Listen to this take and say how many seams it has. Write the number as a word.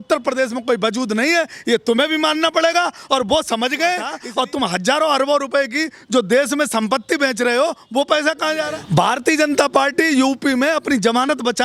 two